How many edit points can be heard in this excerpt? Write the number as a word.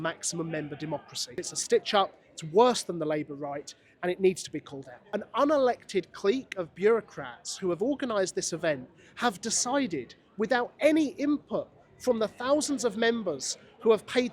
two